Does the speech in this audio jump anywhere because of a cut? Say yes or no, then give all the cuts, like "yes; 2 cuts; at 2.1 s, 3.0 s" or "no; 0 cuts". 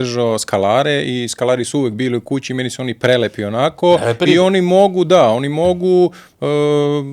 no; 0 cuts